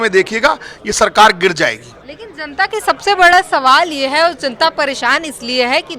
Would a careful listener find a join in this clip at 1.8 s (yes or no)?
no